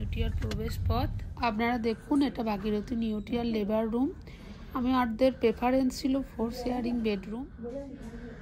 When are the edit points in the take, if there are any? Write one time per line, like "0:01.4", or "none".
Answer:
0:01.2
0:07.3